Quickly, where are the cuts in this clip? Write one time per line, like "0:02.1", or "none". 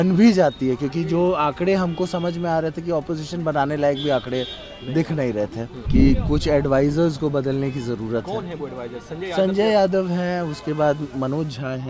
0:05.7